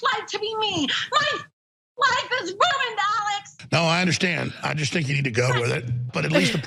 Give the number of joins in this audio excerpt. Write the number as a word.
zero